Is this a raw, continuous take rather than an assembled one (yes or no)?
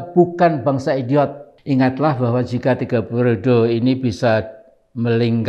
no